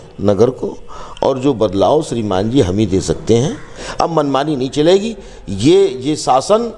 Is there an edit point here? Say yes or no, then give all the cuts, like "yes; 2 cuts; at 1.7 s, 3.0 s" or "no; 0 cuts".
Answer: yes; 1 cut; at 3.8 s